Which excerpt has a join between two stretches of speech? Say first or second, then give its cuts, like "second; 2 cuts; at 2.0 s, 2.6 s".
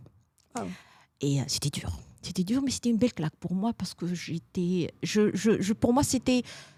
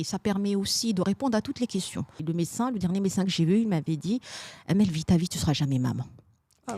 second; 1 cut; at 2.1 s